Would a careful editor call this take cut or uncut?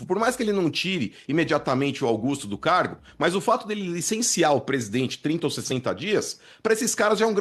uncut